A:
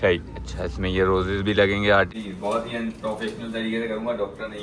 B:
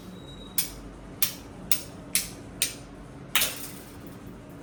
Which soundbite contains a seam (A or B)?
A